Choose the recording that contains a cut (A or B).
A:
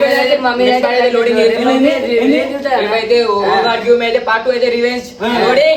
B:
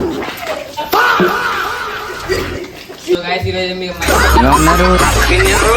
B